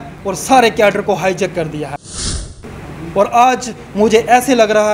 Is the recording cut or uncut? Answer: cut